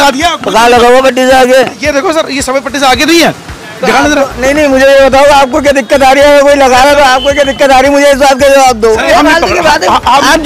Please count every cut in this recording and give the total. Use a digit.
1